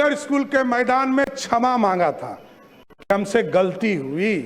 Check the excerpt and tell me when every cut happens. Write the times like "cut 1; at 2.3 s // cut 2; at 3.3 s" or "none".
none